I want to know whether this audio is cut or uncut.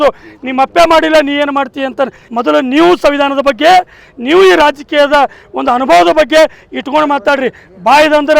cut